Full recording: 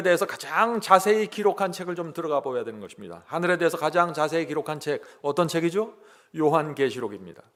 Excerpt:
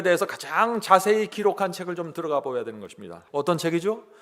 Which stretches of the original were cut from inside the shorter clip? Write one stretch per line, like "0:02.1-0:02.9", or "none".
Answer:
0:03.2-0:05.1